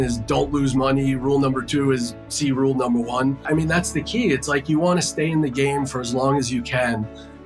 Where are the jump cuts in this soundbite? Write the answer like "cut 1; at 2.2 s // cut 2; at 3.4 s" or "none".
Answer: cut 1; at 3.4 s